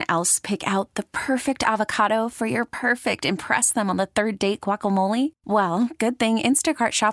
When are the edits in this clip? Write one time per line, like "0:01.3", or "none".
none